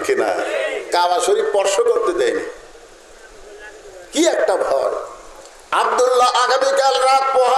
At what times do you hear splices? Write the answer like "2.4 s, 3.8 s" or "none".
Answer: 5.3 s

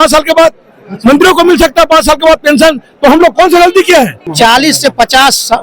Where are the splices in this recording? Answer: 4.3 s

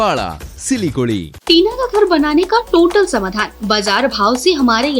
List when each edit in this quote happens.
1.3 s

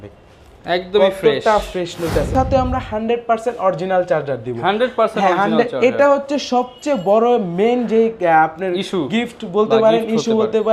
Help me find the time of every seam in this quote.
2.3 s

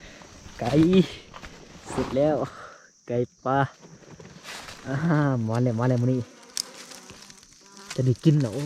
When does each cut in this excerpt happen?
none

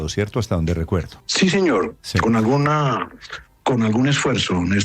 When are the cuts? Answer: 1.2 s

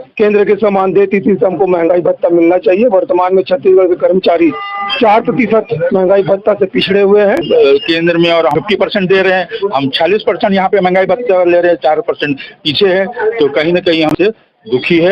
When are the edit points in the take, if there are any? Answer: 7.4 s, 8.5 s, 14.1 s

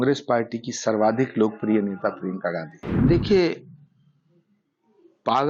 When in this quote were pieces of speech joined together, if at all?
2.8 s

